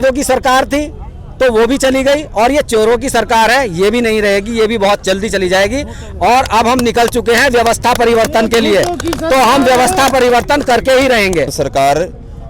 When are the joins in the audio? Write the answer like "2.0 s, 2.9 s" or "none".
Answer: 11.5 s